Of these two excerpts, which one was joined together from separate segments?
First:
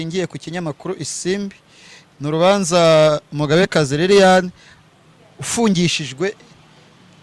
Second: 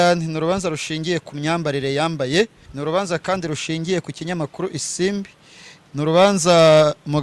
second; 1 cut; at 2.6 s

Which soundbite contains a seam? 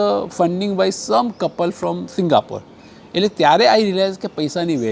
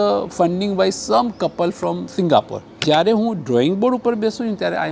second; 1 cut; at 2.8 s

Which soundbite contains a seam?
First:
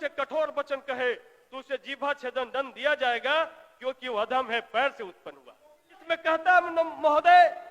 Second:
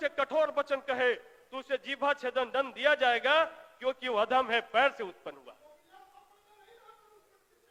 first; 1 cut; at 5.9 s

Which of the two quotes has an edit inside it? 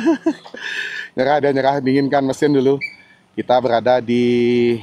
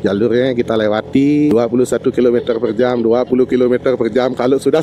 second; 1 cut; at 1.5 s

